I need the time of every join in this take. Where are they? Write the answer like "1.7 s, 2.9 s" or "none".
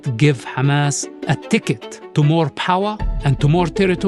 1.1 s, 1.9 s